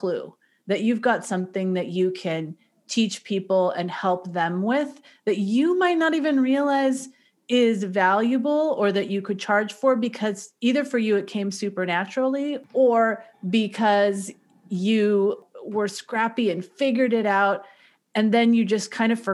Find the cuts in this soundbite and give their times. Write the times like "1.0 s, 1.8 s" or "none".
12.6 s, 15.5 s